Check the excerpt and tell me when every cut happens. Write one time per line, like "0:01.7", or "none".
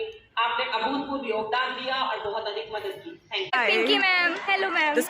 0:03.5